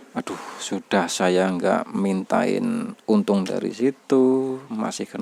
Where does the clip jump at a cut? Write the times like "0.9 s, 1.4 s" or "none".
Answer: none